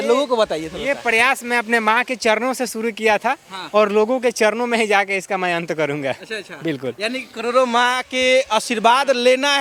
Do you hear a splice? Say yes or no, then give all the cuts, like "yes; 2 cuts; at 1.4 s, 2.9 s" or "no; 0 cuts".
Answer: no; 0 cuts